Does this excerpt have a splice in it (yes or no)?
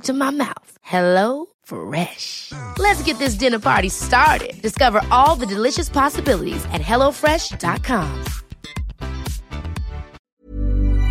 yes